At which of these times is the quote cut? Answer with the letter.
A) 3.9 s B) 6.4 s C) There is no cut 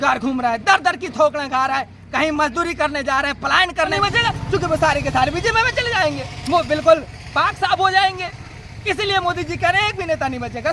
A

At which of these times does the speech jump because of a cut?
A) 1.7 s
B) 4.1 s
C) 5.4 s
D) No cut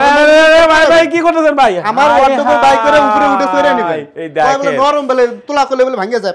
D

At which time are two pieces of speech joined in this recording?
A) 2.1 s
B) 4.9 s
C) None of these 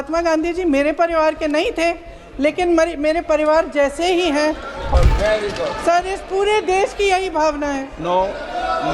B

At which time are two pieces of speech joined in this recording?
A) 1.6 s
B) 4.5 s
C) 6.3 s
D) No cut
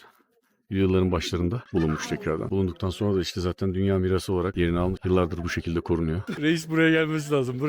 C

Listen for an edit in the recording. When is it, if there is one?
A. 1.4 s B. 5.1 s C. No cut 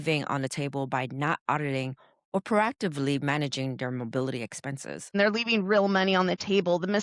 B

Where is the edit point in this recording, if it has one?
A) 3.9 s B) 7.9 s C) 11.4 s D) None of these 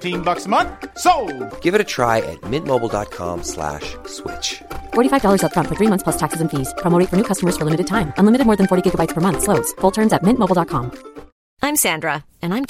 D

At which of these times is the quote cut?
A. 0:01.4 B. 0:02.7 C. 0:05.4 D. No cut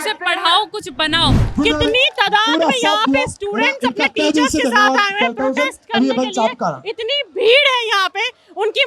A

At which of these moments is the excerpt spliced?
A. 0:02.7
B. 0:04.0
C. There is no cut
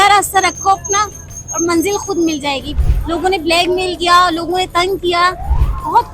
A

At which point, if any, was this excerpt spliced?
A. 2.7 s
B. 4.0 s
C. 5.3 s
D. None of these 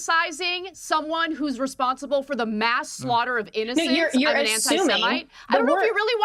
D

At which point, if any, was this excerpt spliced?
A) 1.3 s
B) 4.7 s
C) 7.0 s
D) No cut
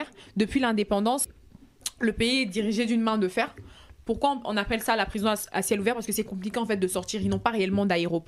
A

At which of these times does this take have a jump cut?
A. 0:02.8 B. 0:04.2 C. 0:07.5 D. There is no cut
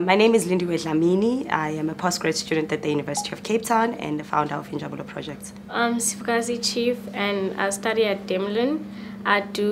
A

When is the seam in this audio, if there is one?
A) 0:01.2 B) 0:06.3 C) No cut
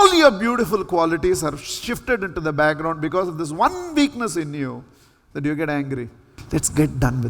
B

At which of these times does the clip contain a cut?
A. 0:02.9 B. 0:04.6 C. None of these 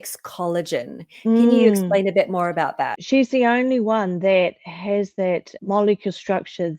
A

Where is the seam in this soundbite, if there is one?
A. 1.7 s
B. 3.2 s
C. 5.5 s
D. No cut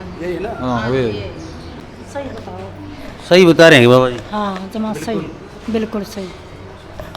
A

